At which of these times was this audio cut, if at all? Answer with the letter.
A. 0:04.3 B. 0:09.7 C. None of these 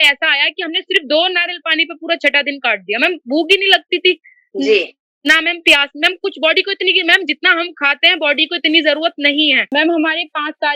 B